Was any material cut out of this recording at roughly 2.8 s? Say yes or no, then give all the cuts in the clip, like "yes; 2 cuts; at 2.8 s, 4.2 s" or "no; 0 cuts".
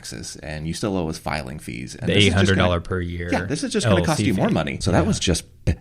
no; 1 cut; at 4.7 s